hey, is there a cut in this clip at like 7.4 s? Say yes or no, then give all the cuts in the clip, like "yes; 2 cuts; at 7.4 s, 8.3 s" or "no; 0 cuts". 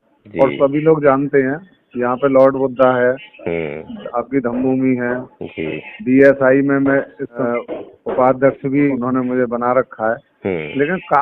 yes; 2 cuts; at 7.4 s, 8.9 s